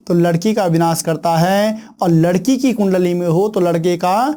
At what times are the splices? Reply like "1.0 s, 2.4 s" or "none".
none